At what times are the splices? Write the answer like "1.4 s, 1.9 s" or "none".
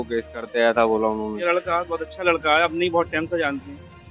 1.4 s